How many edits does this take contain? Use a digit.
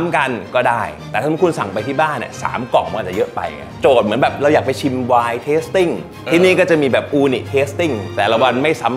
2